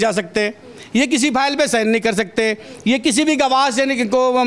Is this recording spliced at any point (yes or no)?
no